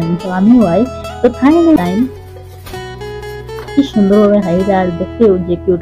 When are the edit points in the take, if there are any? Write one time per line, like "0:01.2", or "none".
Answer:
0:01.8